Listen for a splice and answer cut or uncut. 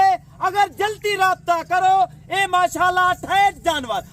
uncut